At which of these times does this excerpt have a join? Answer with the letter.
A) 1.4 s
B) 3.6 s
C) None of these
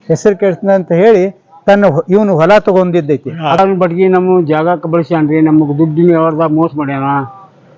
B